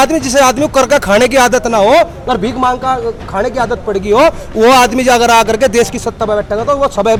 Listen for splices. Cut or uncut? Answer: uncut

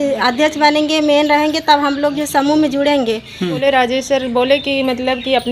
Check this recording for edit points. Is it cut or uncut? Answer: cut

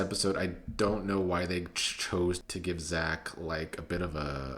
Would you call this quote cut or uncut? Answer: cut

